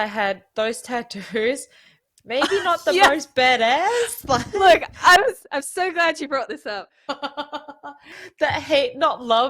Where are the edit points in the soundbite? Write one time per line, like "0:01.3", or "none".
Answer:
0:08.2